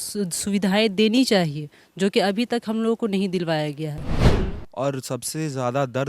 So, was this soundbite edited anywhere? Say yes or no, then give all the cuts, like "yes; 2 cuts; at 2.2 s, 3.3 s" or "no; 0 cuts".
yes; 1 cut; at 4.2 s